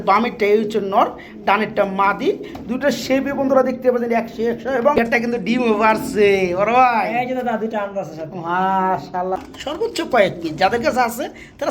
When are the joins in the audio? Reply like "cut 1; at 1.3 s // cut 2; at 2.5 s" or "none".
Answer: cut 1; at 5.1 s // cut 2; at 9.4 s

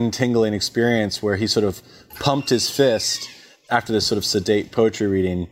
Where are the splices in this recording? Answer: none

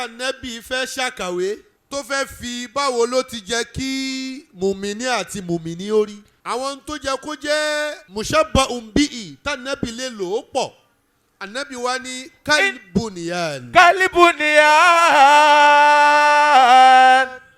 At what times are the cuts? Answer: cut 1; at 1.7 s // cut 2; at 6.3 s // cut 3; at 8.0 s

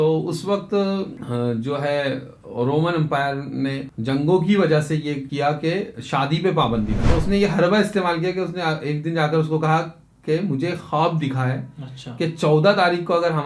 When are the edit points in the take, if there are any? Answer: cut 1; at 1.2 s // cut 2; at 3.9 s // cut 3; at 5.3 s // cut 4; at 7.0 s

